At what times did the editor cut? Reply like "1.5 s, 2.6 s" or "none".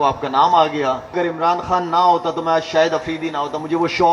1.1 s